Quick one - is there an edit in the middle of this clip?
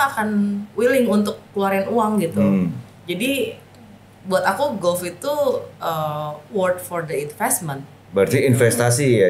yes; 1 cut; at 8.1 s

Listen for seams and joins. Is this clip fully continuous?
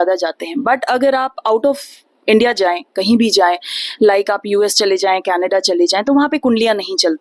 yes; 0 cuts

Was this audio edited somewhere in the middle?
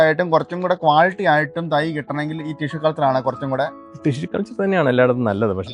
no; 0 cuts

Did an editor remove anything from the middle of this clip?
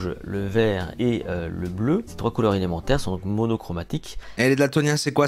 yes; 3 cuts; at 0.9 s, 2.1 s, 4.3 s

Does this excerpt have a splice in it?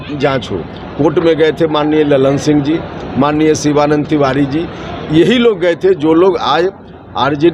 no; 0 cuts

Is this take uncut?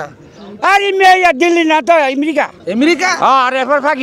yes; 0 cuts

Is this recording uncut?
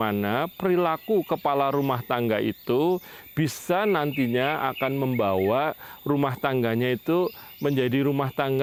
yes; 0 cuts

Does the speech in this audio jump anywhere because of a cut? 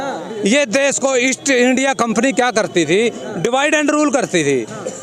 no; 0 cuts

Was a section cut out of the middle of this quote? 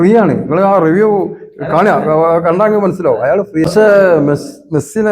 yes; 1 cut; at 3.7 s

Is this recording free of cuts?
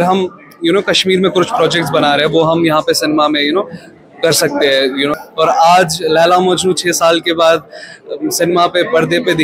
no; 1 cut; at 5.1 s

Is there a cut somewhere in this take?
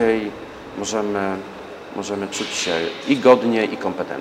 no; 0 cuts

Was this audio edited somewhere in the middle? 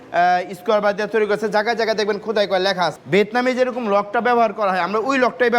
yes; 1 cut; at 3.0 s

